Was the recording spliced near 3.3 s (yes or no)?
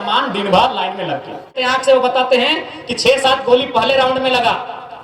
no